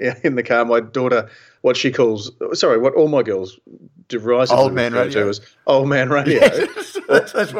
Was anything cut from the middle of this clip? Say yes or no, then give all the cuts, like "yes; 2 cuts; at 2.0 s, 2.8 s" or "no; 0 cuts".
yes; 1 cut; at 1.5 s